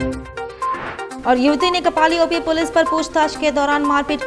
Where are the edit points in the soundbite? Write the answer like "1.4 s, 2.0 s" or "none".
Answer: none